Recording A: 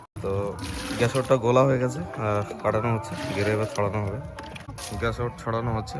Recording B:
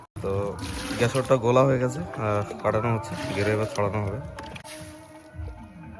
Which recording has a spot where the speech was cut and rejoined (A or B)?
B